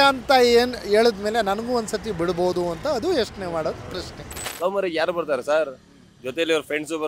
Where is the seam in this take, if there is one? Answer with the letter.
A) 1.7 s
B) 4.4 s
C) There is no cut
B